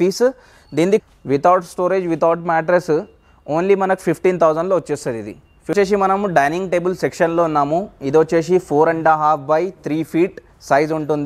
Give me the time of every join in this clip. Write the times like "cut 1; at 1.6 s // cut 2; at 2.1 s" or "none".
cut 1; at 1.0 s // cut 2; at 5.7 s